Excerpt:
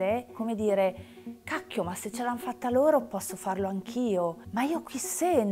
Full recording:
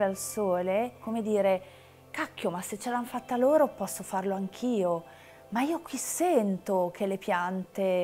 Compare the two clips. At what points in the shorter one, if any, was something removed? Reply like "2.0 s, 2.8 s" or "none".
4.4 s